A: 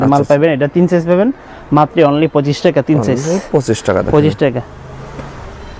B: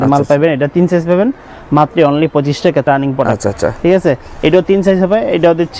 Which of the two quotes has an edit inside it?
B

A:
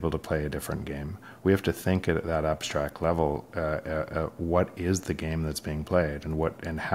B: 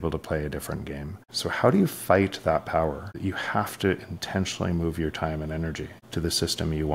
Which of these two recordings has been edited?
B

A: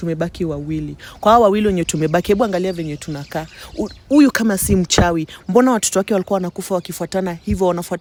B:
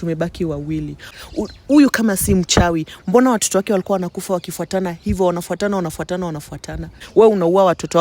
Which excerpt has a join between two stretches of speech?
B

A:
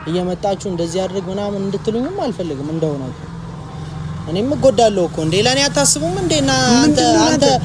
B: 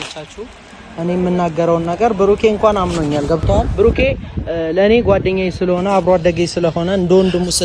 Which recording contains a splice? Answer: B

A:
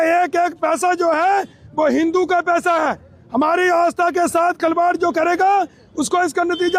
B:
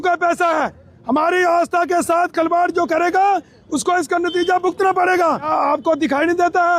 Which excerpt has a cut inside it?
B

